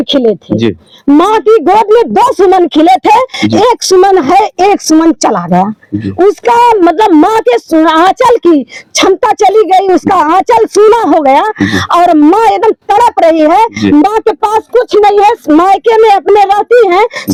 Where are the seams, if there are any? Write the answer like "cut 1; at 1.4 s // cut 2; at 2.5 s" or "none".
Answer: none